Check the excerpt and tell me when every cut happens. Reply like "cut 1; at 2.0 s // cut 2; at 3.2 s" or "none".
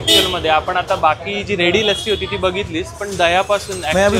none